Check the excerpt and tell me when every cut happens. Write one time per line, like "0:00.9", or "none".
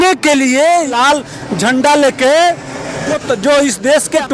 0:00.9